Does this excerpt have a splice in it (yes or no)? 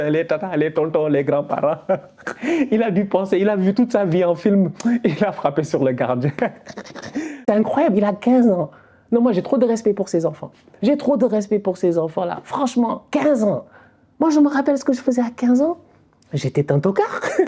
yes